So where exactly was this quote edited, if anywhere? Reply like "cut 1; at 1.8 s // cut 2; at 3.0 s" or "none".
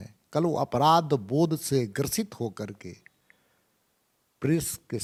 none